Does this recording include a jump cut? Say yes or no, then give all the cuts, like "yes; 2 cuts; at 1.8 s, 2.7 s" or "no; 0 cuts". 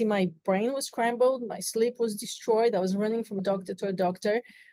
yes; 1 cut; at 3.4 s